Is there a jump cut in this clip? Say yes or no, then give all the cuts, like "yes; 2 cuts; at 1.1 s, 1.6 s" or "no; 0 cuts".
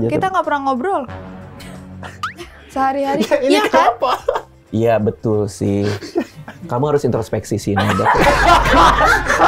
no; 0 cuts